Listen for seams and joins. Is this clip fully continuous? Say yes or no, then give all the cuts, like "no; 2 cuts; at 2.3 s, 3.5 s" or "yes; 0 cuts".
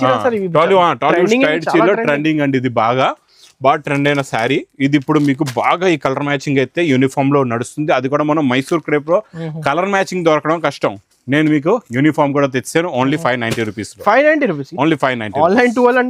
yes; 0 cuts